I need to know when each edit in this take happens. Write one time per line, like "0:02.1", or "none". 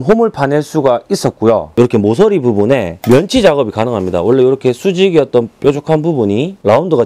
0:01.7